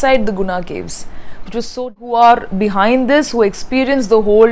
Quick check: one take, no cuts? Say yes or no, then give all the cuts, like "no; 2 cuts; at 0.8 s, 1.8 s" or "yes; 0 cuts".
no; 1 cut; at 2.0 s